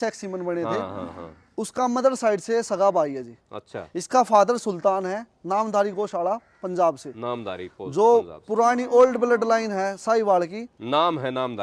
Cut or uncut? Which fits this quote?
uncut